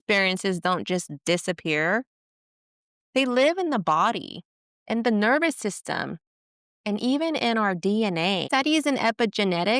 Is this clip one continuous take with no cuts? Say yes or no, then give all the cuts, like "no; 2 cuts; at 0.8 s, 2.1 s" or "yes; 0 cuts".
no; 1 cut; at 8.4 s